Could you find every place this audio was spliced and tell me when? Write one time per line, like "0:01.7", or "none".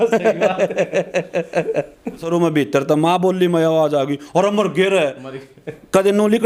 0:02.3